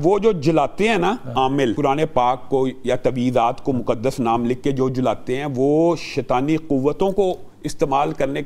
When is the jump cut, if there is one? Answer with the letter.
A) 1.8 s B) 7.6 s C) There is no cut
A